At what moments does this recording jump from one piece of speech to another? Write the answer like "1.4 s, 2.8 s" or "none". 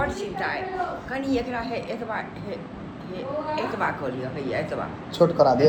none